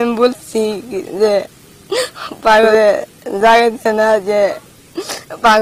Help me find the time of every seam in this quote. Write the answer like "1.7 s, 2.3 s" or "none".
2.7 s